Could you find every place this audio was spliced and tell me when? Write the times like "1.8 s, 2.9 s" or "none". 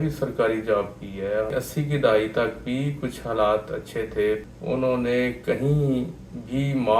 1.5 s, 4.5 s

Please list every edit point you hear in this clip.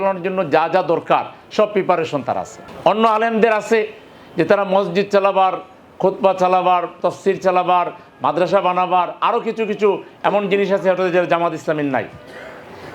none

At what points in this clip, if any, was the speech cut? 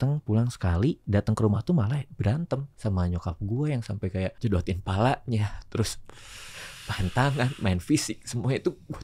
1.0 s, 2.7 s, 4.4 s

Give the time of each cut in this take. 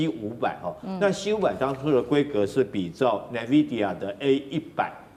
none

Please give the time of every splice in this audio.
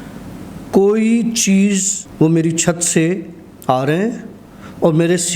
2.0 s

